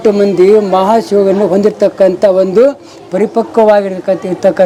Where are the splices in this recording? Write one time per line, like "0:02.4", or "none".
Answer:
none